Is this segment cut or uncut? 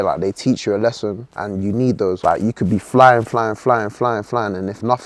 cut